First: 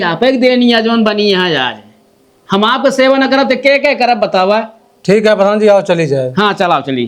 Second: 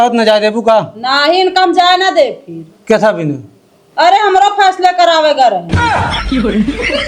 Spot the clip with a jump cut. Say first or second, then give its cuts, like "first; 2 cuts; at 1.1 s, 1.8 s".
second; 1 cut; at 5.7 s